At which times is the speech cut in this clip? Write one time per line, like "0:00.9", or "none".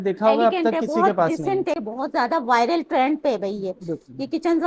0:01.8